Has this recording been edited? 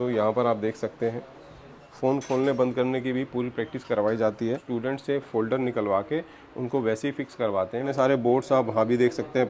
yes; 3 cuts; at 1.8 s, 4.6 s, 7.9 s

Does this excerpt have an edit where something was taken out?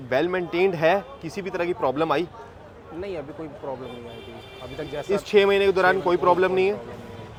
no; 0 cuts

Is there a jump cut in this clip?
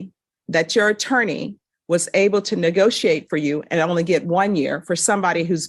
no; 0 cuts

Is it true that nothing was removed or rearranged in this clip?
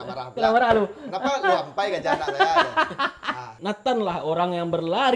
no; 1 cut; at 3.5 s

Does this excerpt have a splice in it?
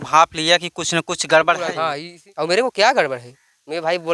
no; 0 cuts

